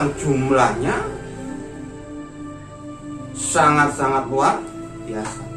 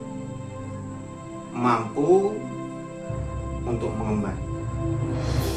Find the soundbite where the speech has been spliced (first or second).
first